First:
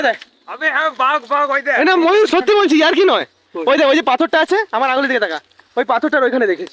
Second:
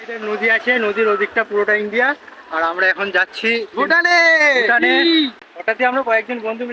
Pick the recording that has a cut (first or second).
second